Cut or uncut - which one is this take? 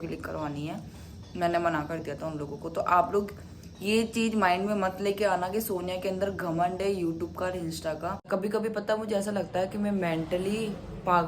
cut